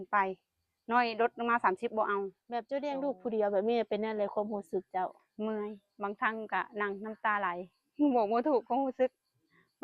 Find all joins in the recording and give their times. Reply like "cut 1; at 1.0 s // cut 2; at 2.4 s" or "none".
cut 1; at 2.5 s